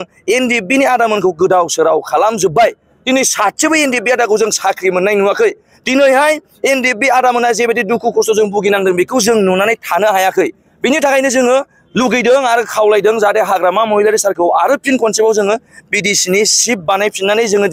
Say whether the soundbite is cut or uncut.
uncut